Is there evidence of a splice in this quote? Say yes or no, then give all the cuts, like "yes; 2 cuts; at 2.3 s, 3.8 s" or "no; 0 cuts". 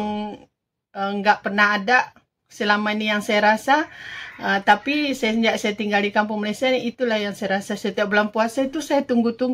no; 0 cuts